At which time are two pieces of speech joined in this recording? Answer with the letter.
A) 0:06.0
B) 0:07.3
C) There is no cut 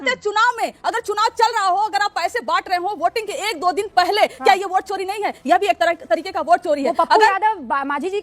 C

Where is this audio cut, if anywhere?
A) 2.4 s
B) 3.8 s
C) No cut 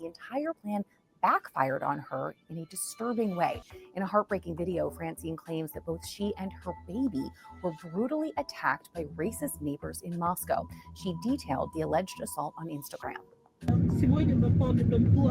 B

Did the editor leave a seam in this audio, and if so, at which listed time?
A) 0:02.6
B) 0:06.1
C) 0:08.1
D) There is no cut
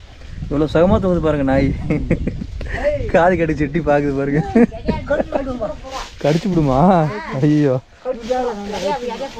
D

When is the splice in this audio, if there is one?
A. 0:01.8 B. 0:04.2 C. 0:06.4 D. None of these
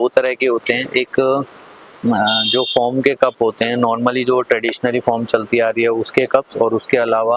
D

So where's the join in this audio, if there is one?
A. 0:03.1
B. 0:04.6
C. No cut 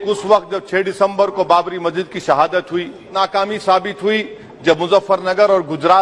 A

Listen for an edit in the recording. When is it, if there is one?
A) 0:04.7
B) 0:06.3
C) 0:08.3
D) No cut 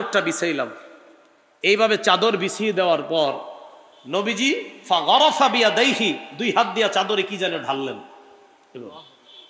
D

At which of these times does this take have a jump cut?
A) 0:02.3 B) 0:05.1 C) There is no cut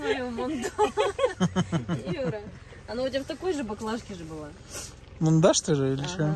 C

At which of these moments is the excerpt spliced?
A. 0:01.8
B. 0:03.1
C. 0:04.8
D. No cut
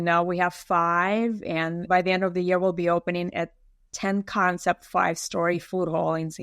A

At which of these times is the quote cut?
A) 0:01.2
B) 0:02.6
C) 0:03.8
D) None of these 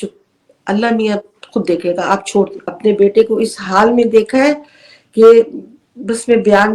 B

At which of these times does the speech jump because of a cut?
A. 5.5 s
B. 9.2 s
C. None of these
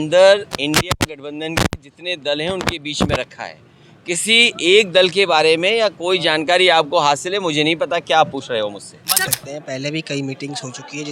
B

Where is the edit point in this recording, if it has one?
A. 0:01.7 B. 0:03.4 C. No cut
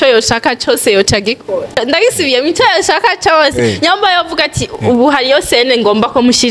A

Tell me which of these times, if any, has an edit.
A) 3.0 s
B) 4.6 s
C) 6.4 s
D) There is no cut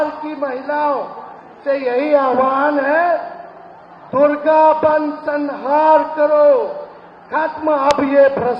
D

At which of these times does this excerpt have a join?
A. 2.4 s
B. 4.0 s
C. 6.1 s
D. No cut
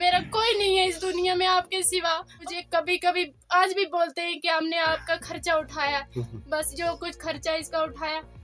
A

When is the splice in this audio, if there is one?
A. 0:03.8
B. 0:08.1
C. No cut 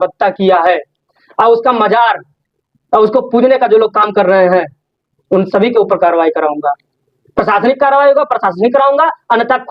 C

